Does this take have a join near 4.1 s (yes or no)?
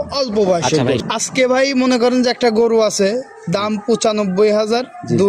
no